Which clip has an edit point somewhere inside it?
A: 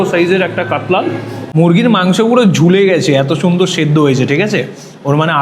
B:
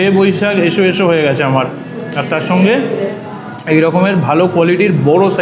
A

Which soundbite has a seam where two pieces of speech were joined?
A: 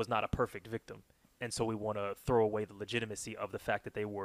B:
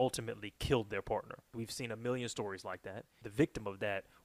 B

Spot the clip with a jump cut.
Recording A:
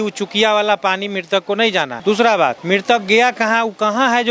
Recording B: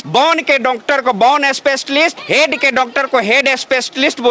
A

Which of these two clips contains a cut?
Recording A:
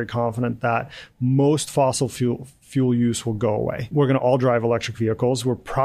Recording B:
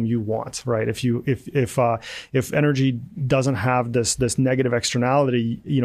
A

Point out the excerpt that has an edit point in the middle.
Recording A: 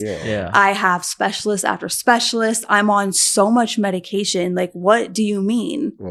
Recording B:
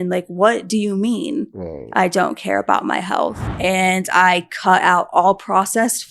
B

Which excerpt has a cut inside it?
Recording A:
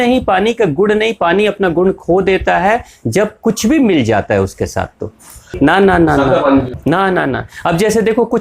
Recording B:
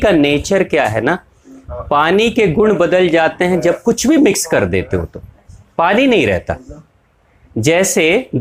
A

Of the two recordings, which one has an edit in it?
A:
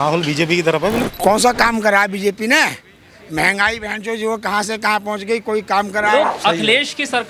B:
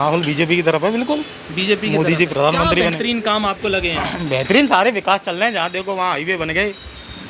A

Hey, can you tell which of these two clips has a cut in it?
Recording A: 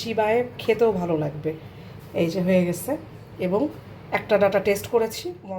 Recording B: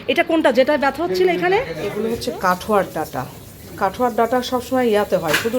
B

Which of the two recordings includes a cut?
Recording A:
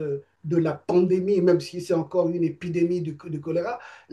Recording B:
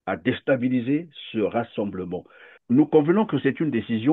B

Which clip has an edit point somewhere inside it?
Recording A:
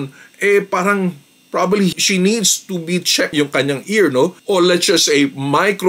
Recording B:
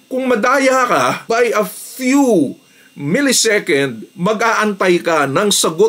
A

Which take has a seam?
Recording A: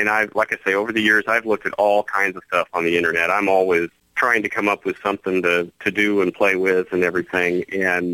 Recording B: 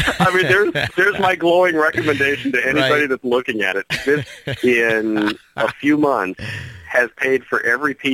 A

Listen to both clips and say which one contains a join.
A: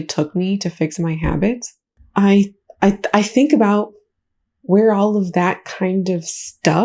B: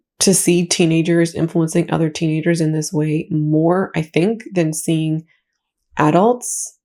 A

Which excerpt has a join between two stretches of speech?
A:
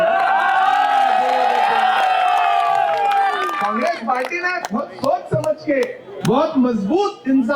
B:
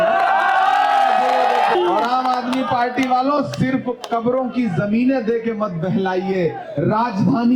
B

